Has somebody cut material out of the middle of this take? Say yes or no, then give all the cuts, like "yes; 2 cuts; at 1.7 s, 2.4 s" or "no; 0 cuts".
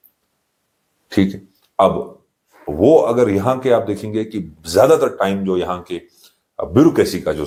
no; 0 cuts